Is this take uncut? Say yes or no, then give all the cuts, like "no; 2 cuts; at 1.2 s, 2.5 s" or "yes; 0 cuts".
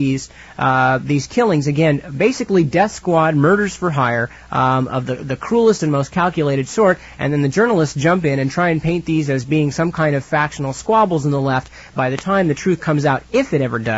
yes; 0 cuts